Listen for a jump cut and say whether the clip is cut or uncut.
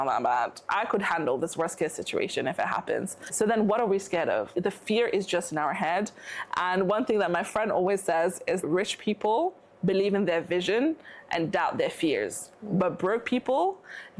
cut